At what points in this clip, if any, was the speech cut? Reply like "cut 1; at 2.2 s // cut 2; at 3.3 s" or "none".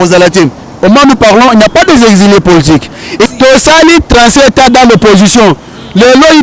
cut 1; at 3.3 s